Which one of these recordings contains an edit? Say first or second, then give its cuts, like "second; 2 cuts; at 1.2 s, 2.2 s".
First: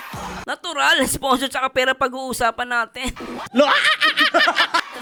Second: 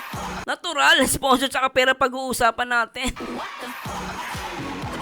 second; 1 cut; at 3.5 s